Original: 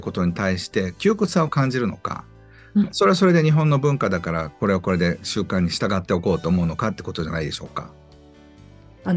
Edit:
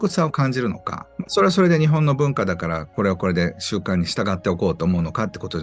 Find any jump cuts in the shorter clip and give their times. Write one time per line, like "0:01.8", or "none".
0:01.3